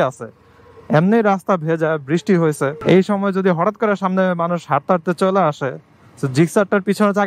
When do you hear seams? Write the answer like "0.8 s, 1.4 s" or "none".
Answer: 2.8 s